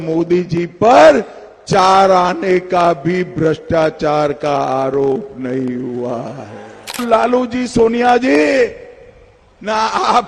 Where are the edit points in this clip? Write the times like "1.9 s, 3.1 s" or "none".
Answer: 7.0 s